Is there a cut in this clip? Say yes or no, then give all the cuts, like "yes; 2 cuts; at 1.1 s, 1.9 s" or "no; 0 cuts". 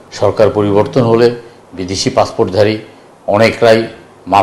no; 0 cuts